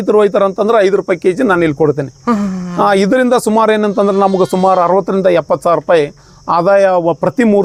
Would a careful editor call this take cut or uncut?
uncut